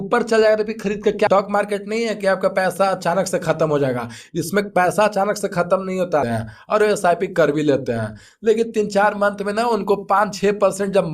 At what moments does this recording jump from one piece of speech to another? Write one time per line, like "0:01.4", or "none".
0:01.3
0:06.3